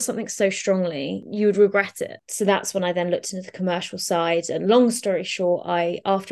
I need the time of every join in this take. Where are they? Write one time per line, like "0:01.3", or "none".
0:01.2
0:02.2